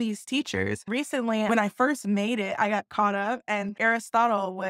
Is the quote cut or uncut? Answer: cut